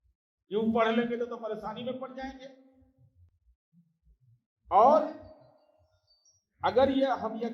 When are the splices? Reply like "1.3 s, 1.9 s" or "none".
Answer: none